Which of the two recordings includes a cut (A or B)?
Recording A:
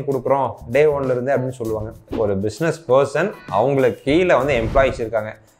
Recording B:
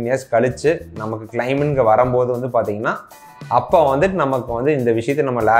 A